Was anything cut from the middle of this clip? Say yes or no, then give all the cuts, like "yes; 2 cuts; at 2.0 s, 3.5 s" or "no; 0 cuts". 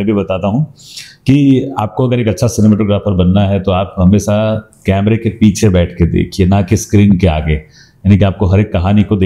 no; 0 cuts